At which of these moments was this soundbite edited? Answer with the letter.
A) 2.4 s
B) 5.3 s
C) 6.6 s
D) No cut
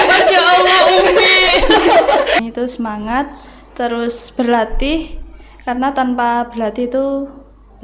A